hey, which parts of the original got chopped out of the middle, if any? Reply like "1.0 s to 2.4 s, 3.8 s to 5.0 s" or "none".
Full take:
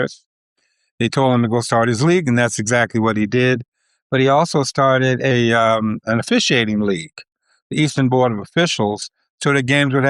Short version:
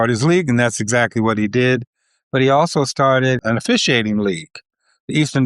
5.2 s to 6.0 s